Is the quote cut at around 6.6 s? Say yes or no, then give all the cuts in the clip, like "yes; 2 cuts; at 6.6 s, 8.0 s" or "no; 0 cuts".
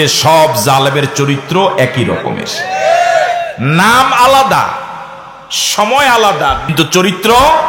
yes; 1 cut; at 6.6 s